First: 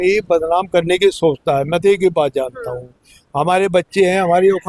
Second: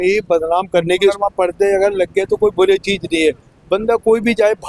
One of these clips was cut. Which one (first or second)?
second